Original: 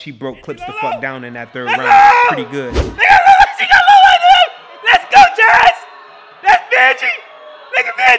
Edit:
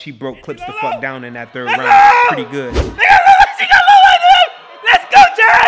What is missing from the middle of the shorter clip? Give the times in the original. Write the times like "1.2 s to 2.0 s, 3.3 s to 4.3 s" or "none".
none